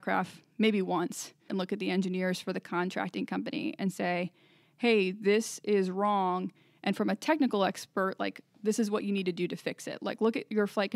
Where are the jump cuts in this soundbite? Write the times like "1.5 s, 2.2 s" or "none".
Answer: 1.5 s